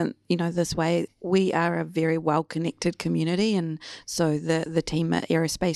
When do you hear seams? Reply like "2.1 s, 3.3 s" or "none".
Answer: 1.1 s